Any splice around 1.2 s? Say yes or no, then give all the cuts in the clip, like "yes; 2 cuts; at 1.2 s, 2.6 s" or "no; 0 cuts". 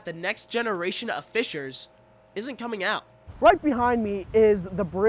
no; 1 cut; at 3.1 s